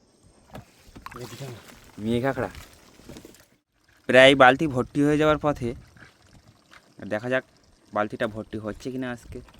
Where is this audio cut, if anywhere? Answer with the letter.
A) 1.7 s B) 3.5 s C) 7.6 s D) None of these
B